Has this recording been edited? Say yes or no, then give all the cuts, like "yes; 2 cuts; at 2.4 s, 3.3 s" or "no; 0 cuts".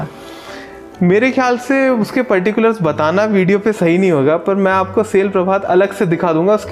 no; 0 cuts